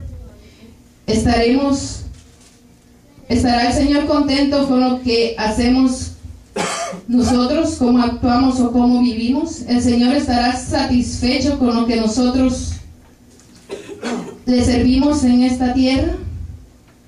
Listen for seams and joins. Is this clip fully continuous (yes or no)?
no